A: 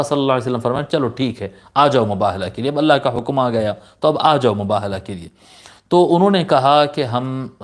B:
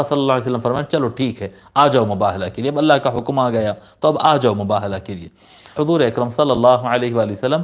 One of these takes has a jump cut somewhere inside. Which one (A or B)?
B